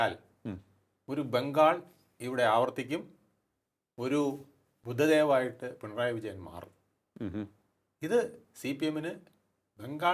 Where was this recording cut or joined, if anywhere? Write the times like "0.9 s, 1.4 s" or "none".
none